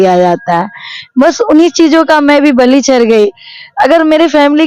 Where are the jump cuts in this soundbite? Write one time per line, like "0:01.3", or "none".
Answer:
none